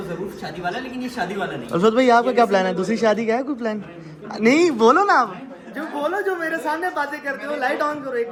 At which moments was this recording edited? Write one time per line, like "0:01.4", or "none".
none